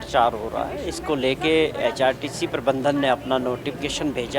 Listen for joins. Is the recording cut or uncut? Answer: uncut